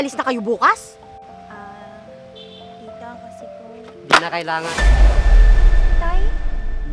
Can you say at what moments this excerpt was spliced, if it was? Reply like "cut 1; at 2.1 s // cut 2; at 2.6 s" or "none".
none